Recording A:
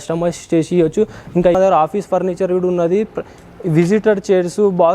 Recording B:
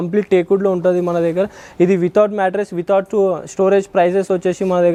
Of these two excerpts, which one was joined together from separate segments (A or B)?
A